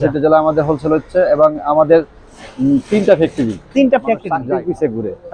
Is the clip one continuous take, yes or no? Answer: no